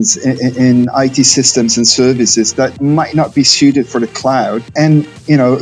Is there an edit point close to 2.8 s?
yes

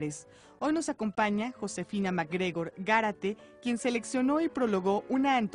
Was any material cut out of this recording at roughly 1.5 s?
yes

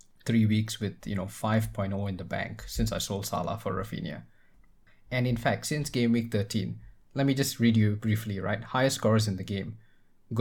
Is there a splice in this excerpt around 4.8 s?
yes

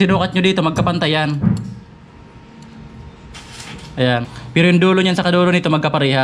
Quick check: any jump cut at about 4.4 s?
yes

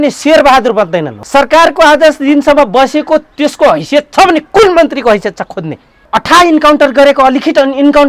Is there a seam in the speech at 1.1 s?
yes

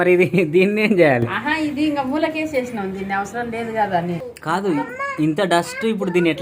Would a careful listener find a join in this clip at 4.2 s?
yes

